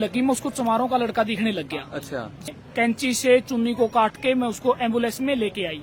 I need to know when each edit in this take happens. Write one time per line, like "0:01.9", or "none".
0:02.5